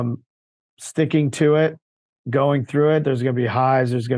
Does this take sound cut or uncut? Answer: uncut